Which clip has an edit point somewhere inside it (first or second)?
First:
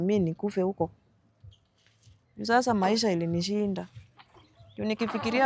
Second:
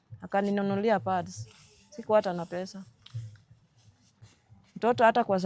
second